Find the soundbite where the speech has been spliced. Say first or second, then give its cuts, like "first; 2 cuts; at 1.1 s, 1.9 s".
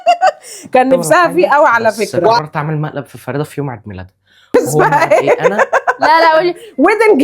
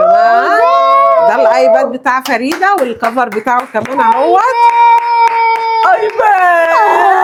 first; 2 cuts; at 2.4 s, 4.5 s